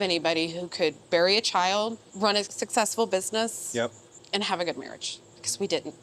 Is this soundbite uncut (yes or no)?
no